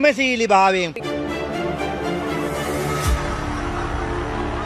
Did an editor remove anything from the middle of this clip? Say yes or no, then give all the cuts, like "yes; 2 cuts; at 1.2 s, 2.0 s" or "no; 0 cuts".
yes; 1 cut; at 0.9 s